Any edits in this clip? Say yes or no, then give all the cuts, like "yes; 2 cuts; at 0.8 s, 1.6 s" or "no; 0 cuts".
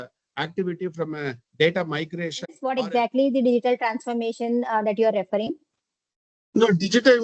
yes; 1 cut; at 2.6 s